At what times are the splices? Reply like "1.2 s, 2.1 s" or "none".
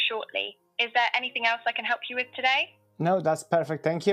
none

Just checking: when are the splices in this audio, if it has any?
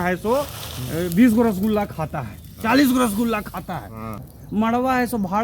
4.0 s

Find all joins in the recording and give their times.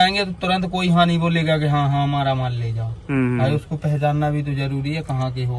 none

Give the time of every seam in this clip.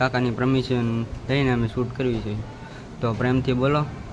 none

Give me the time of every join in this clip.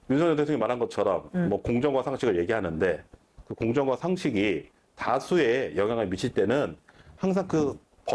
none

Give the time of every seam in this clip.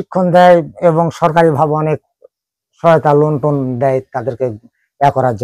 none

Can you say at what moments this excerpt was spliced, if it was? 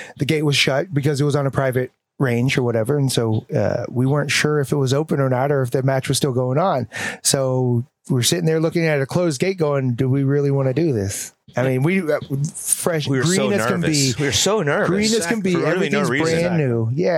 none

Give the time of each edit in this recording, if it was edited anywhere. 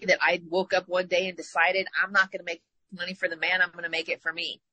none

